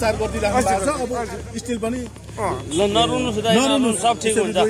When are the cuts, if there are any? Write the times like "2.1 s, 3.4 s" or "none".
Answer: none